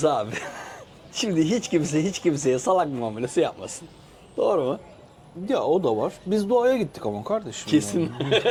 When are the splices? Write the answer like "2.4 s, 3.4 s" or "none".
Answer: none